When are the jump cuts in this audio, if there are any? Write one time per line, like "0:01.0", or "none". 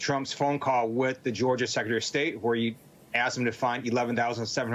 none